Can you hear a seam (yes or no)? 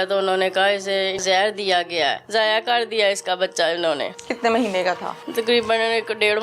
yes